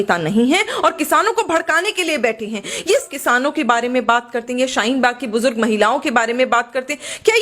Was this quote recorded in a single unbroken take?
no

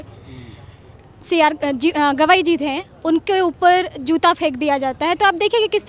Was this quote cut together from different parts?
no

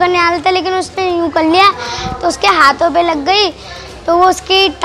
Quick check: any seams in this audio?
no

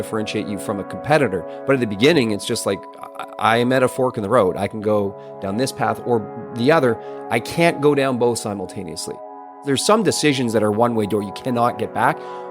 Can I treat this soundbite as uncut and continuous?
no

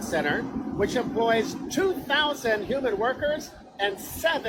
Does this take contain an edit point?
no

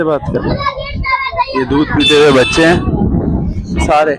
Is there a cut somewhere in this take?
no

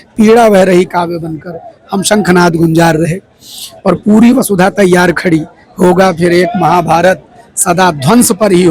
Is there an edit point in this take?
no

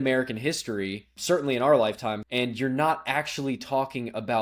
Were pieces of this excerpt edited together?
yes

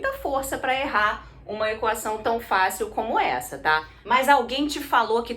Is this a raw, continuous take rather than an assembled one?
no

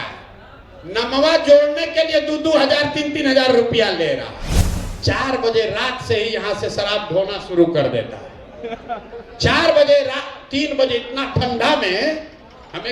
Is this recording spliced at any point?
yes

